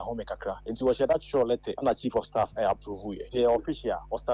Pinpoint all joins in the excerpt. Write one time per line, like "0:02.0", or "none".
0:01.7